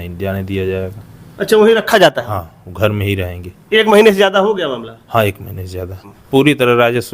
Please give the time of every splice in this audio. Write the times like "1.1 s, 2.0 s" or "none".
6.2 s